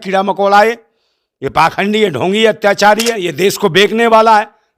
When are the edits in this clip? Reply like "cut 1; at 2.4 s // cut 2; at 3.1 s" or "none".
cut 1; at 3.3 s